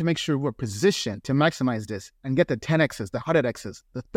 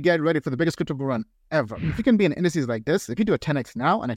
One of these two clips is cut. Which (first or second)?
second